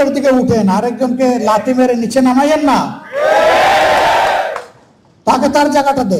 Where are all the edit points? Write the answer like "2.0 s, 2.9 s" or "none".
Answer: none